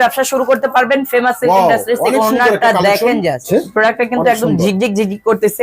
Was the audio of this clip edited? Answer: yes; 1 cut; at 3.4 s

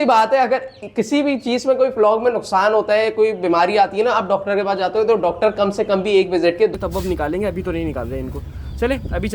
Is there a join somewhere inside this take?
yes; 1 cut; at 6.7 s

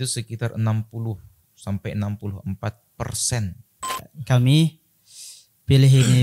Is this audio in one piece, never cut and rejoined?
no; 1 cut; at 4.1 s

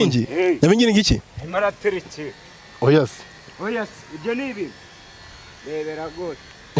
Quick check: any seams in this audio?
no; 0 cuts

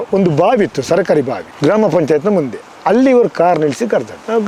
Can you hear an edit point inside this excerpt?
no; 0 cuts

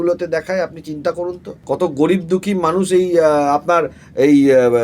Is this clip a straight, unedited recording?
no; 1 cut; at 1.5 s

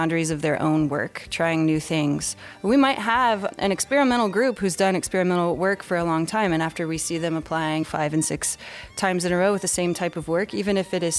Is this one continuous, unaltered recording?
yes; 0 cuts

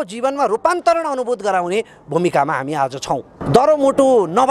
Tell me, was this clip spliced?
yes; 1 cut; at 3.3 s

